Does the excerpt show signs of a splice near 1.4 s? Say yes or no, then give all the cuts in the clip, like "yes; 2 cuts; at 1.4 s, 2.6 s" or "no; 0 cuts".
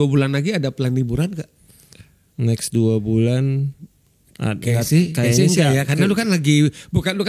no; 0 cuts